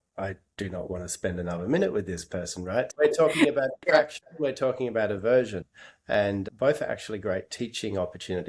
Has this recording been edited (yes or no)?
yes